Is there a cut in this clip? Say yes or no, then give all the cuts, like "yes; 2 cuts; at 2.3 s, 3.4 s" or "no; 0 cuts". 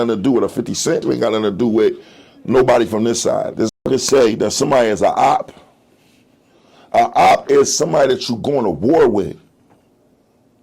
yes; 2 cuts; at 1.0 s, 3.7 s